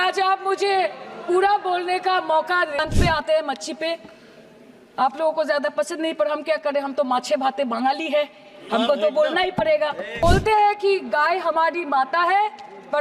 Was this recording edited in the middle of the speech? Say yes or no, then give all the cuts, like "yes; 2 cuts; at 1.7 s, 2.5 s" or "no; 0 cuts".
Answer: yes; 2 cuts; at 2.8 s, 10.2 s